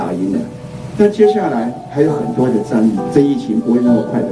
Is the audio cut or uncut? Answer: cut